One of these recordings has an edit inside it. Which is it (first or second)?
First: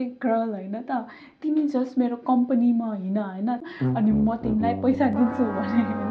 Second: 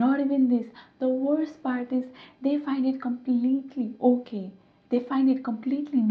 first